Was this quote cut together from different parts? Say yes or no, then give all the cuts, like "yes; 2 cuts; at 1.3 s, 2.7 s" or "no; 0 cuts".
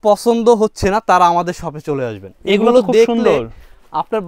no; 0 cuts